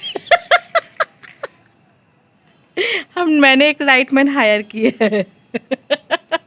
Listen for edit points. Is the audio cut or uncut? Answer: uncut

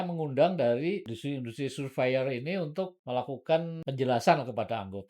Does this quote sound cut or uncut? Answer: cut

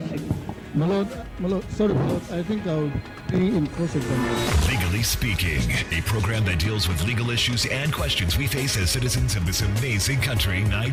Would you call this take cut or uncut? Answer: uncut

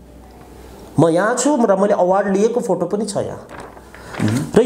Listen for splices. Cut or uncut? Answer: uncut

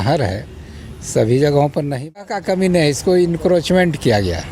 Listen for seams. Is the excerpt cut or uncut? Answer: cut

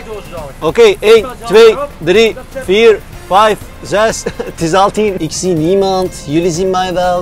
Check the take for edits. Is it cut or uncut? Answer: cut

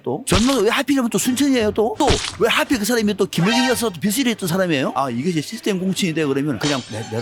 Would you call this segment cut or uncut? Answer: uncut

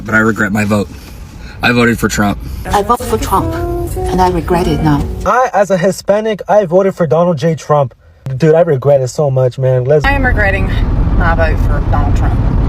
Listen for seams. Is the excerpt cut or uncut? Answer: uncut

